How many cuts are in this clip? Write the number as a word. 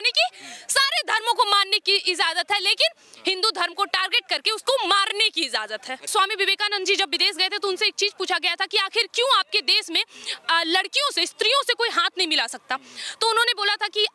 one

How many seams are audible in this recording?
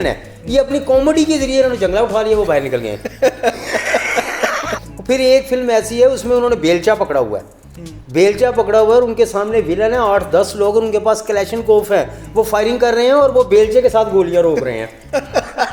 one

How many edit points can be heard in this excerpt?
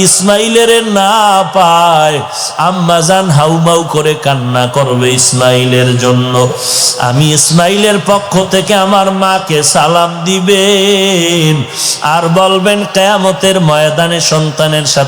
zero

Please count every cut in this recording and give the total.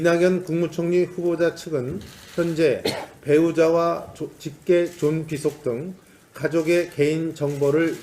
one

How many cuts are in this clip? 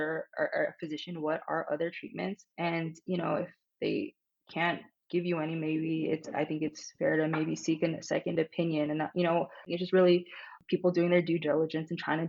two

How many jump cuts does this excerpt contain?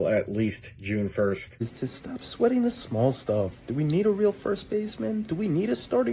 one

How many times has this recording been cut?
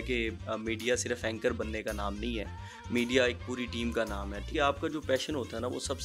one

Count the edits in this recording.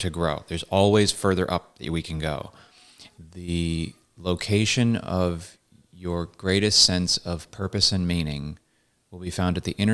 one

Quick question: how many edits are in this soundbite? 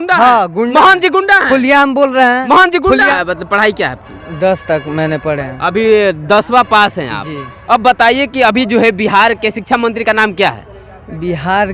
one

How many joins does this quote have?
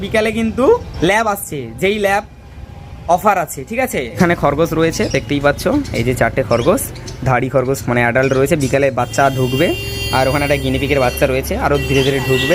two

